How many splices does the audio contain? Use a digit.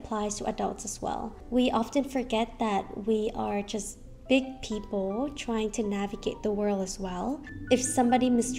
1